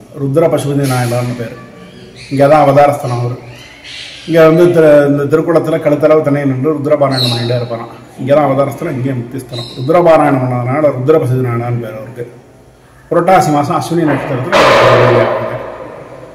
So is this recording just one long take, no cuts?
yes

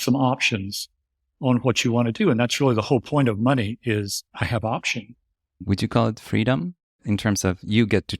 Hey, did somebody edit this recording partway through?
yes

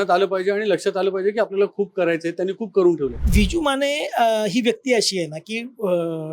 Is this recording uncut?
no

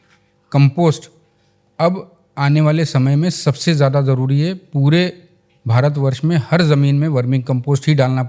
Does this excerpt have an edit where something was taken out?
no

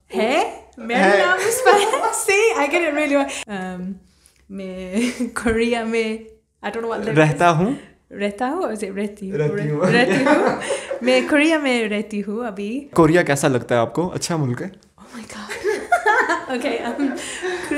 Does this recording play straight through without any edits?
yes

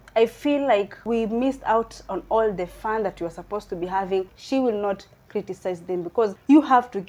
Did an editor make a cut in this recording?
yes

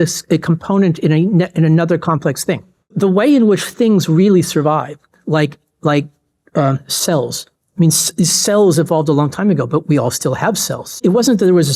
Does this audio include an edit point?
yes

